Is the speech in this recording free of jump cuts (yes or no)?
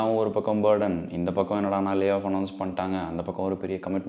yes